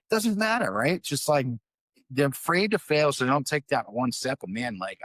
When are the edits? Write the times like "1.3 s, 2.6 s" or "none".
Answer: none

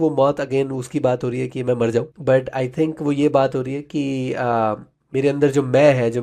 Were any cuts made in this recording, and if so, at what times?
2.1 s

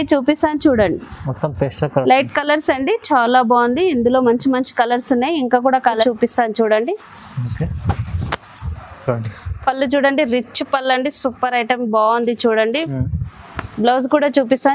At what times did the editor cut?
6.0 s

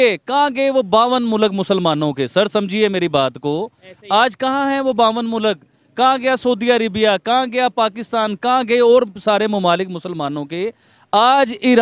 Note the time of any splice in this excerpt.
none

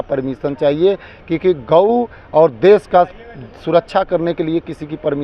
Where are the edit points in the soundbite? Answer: none

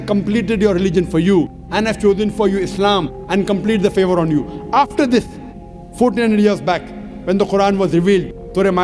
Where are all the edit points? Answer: none

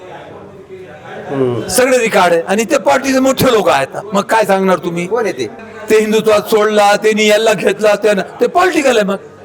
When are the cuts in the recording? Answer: 5.5 s

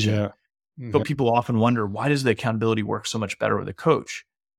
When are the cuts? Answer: 1.0 s

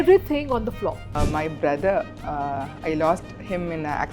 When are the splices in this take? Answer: 1.1 s

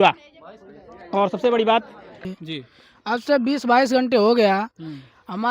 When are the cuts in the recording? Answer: 2.2 s

